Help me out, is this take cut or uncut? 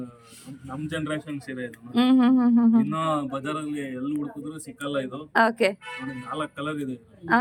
uncut